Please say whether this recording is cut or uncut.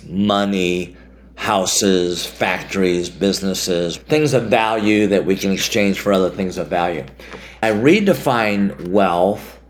cut